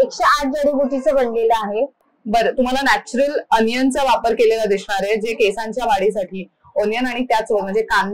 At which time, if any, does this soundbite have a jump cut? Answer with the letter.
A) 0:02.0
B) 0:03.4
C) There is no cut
A